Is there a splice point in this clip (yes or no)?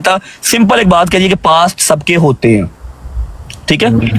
no